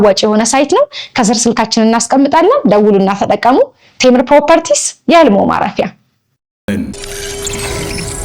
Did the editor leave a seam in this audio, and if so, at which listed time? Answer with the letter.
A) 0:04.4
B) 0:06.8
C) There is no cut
B